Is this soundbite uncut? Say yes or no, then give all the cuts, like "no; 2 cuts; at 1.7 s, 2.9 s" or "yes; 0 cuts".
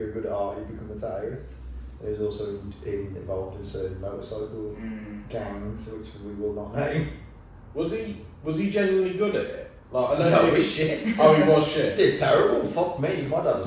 yes; 0 cuts